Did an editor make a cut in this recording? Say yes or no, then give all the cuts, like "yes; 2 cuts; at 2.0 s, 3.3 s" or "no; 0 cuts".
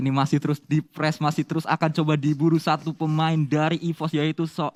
no; 0 cuts